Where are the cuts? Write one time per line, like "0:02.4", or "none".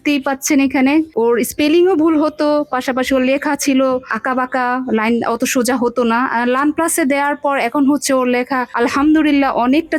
none